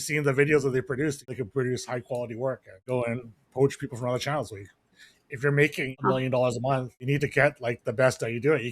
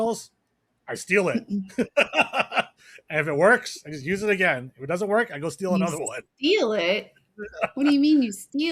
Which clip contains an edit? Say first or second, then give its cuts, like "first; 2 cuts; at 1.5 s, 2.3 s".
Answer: first; 4 cuts; at 1.3 s, 2.7 s, 6.0 s, 7.0 s